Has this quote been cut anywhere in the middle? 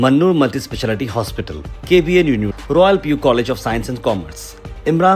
no; 0 cuts

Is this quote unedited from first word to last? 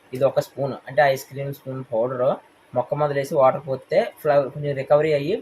yes; 0 cuts

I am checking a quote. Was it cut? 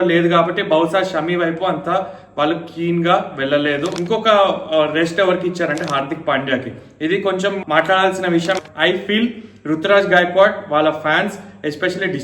yes; 2 cuts; at 3.9 s, 8.6 s

